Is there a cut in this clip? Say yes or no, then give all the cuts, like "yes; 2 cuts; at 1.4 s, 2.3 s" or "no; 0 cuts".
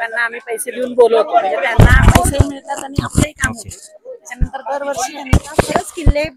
yes; 1 cut; at 5.3 s